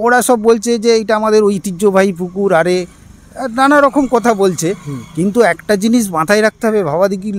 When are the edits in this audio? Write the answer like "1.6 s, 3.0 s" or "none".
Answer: none